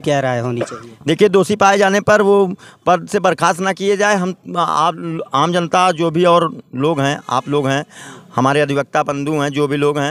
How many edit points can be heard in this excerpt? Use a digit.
0